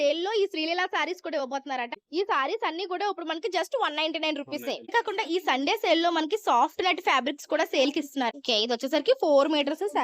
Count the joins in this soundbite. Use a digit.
3